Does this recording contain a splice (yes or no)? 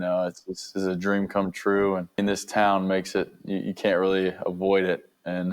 yes